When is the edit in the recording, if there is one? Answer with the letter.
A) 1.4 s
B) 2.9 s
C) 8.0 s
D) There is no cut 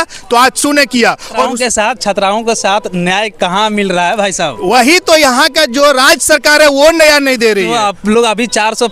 A